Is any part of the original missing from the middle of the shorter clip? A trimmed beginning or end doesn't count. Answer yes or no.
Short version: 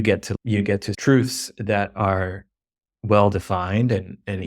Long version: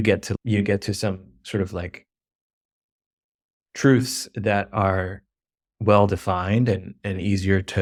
yes